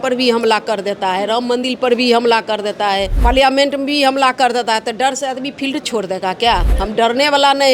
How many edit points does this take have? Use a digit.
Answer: 2